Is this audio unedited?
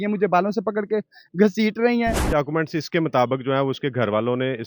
no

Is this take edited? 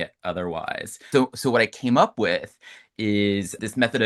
yes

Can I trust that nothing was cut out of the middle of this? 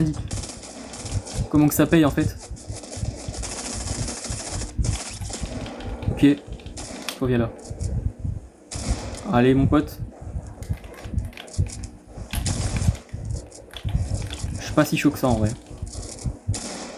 yes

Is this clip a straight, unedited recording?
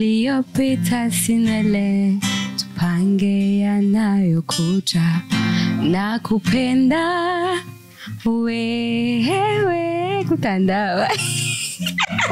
yes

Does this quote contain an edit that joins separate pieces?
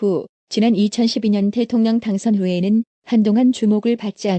yes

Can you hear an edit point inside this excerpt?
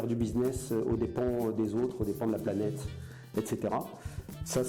no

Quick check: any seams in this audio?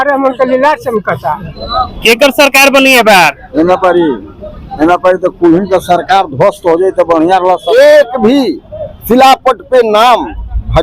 yes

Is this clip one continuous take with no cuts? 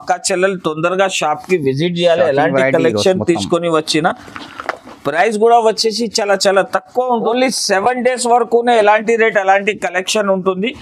no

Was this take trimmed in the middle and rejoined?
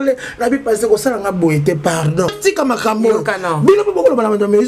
yes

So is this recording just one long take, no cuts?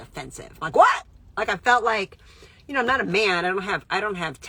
yes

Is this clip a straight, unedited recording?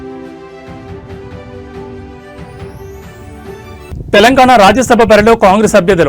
no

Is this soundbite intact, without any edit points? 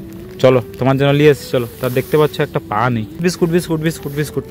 no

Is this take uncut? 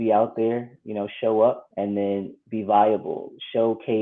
no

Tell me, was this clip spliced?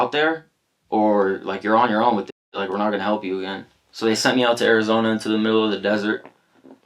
no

